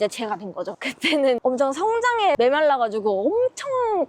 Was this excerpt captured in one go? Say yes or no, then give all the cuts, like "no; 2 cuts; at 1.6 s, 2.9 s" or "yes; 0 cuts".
no; 2 cuts; at 1.2 s, 2.4 s